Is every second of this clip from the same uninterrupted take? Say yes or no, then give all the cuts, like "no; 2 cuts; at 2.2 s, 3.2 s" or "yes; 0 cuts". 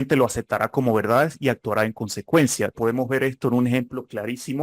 no; 1 cut; at 2.7 s